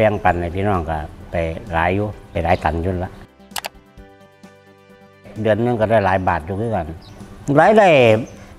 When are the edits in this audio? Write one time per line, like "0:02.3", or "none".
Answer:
none